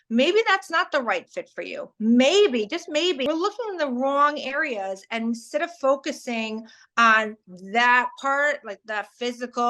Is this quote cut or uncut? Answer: cut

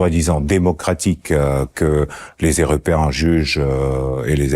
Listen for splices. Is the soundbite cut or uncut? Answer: uncut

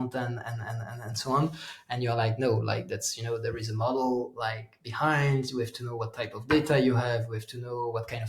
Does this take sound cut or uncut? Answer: uncut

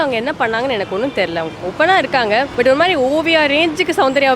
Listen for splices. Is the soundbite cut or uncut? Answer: uncut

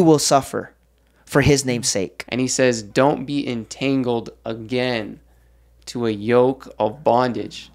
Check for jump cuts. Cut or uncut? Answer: cut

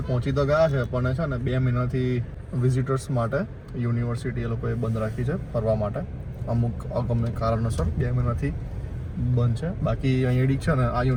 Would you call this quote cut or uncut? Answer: uncut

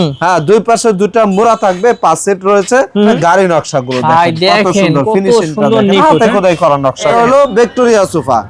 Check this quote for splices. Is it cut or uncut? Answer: cut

